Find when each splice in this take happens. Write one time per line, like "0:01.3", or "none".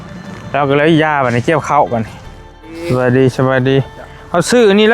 0:02.7